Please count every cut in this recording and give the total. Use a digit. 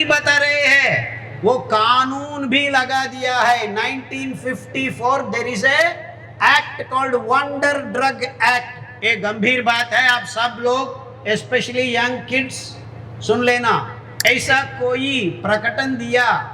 1